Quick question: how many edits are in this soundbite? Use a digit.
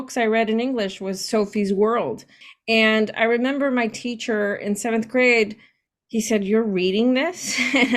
1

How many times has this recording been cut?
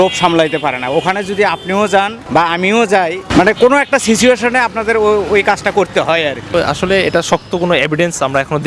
3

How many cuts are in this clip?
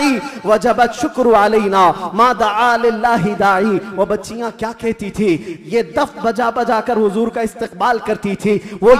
0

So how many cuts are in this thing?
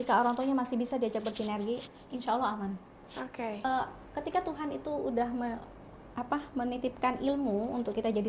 1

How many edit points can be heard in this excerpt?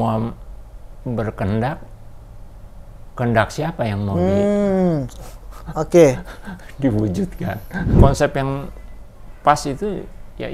1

